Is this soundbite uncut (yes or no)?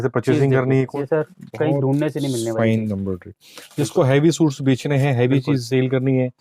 no